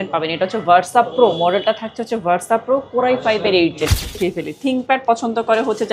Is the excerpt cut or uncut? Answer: cut